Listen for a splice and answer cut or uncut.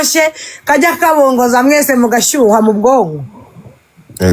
uncut